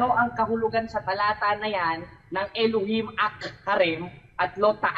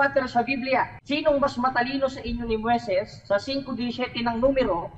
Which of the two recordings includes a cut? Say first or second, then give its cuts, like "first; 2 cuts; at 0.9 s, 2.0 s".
second; 1 cut; at 1.0 s